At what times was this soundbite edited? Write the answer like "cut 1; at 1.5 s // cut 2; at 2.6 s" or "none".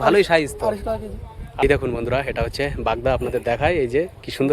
cut 1; at 1.6 s